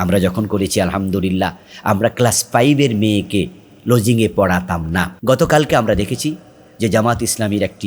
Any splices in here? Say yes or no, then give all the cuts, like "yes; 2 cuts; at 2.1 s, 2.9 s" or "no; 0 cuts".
yes; 1 cut; at 5.1 s